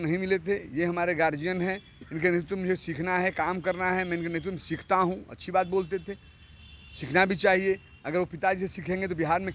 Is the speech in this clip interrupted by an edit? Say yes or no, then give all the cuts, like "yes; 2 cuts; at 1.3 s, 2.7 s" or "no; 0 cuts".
no; 0 cuts